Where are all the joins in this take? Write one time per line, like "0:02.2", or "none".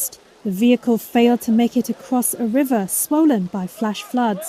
none